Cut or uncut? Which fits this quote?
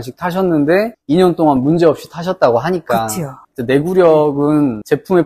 uncut